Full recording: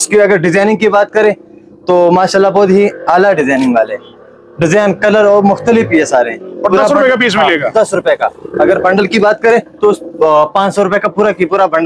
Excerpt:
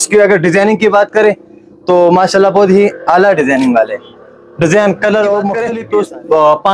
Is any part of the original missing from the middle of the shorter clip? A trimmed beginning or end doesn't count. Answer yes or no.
yes